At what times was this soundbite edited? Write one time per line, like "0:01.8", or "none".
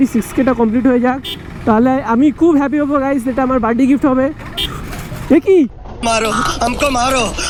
none